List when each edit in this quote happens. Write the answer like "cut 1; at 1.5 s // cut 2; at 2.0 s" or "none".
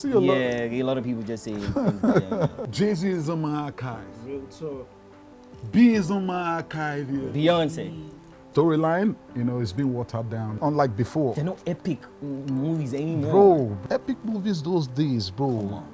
cut 1; at 2.6 s // cut 2; at 8.4 s